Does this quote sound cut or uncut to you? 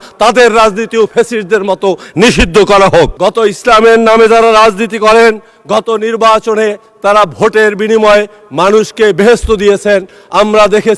cut